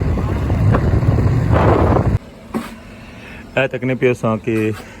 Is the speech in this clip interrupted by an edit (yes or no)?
yes